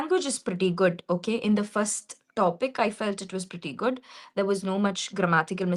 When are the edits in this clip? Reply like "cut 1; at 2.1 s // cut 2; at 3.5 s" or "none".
none